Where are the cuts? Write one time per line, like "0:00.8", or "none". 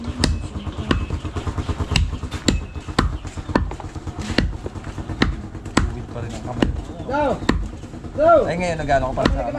none